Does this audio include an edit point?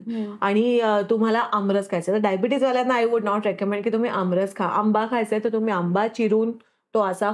no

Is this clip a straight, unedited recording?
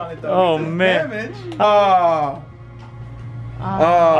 no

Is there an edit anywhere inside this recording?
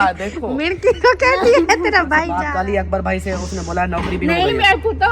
yes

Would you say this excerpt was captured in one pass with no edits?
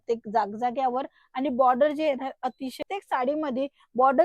no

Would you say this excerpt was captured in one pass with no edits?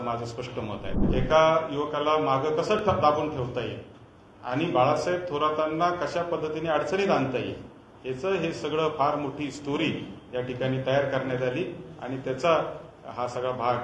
no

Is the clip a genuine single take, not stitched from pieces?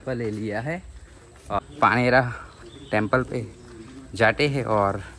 yes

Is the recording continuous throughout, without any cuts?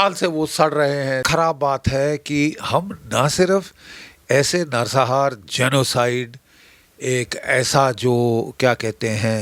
yes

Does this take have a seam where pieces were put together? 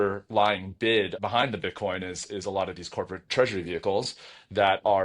yes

